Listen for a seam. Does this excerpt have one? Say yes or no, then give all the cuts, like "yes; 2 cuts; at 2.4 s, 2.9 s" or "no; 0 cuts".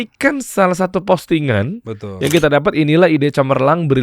no; 0 cuts